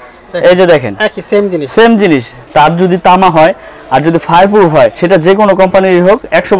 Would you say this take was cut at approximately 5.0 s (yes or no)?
yes